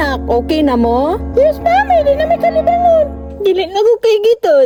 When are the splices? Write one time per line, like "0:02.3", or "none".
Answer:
none

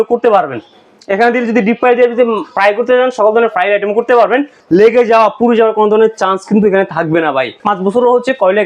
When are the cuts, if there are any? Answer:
0:04.5
0:07.6

